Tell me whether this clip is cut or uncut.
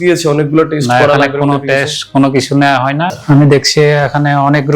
cut